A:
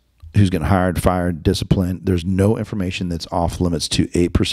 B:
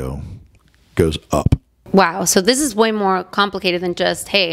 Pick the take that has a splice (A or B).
B